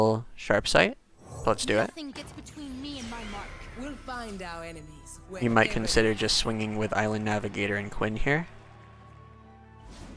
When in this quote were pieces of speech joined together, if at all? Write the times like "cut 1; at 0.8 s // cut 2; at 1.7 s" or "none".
none